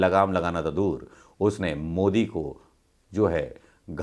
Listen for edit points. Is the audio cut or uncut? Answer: uncut